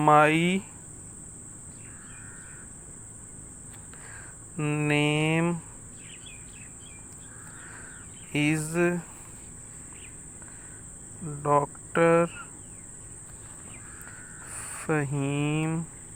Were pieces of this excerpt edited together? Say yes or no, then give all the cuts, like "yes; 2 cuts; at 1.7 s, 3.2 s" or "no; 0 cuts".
no; 0 cuts